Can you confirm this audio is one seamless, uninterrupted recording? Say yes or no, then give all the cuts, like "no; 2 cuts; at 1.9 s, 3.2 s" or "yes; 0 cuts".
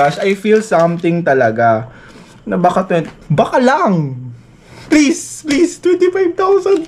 yes; 0 cuts